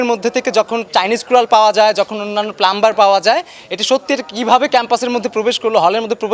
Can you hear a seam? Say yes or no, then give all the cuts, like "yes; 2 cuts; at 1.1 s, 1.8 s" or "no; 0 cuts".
no; 0 cuts